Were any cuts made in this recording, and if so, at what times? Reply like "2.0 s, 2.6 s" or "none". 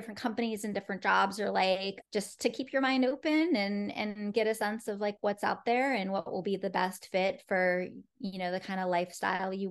1.9 s